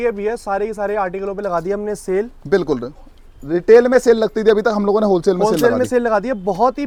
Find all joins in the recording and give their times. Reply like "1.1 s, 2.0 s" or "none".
none